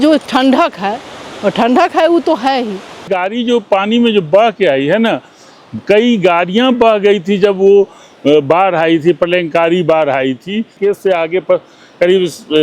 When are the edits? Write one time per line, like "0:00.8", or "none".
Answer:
0:03.1
0:10.7